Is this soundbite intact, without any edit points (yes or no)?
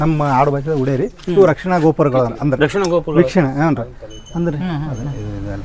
yes